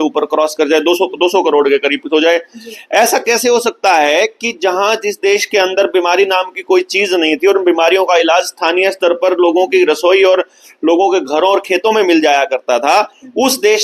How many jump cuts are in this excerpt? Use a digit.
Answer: 0